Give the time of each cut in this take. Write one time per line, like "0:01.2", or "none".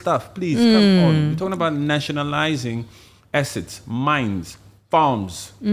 none